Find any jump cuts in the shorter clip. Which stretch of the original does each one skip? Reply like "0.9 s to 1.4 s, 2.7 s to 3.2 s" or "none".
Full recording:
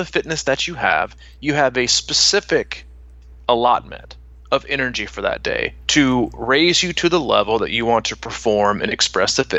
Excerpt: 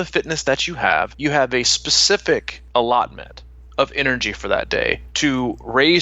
1.1 s to 1.4 s, 2.8 s to 3.3 s